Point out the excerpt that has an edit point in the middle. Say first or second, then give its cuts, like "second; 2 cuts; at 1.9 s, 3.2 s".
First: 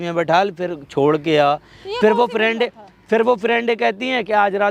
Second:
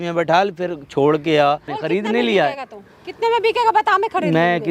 second; 1 cut; at 1.7 s